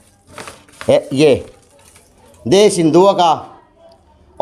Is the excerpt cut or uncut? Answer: uncut